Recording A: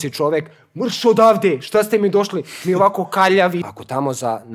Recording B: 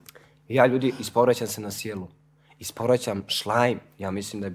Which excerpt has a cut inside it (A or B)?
A